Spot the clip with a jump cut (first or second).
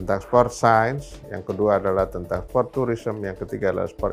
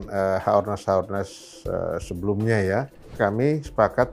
second